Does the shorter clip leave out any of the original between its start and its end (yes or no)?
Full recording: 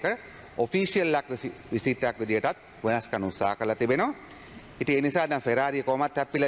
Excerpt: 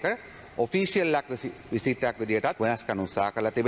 yes